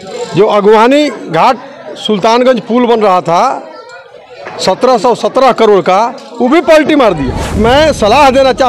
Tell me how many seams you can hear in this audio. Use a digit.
1